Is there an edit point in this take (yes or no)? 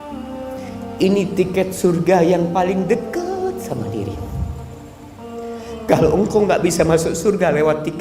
yes